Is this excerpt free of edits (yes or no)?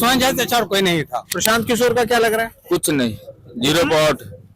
no